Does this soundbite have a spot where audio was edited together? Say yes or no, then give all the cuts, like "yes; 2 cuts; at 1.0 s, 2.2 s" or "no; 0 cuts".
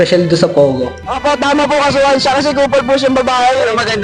yes; 1 cut; at 1.1 s